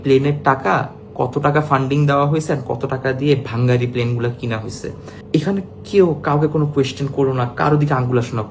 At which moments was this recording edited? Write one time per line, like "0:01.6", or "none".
0:05.1